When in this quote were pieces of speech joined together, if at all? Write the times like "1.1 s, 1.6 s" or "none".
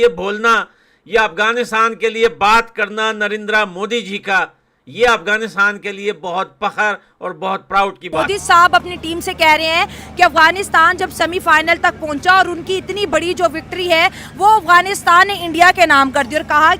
8.1 s